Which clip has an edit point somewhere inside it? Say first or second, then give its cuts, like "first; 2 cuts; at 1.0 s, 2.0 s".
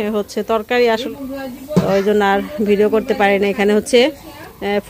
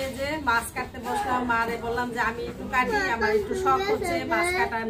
first; 1 cut; at 1.1 s